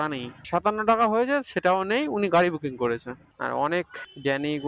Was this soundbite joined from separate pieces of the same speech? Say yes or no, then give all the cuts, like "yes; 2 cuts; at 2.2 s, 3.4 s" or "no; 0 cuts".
yes; 1 cut; at 3.3 s